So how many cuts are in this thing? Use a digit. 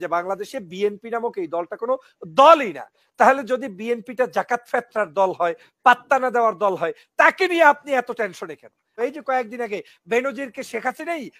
1